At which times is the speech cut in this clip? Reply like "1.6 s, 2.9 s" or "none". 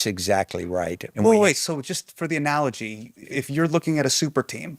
1.0 s, 3.3 s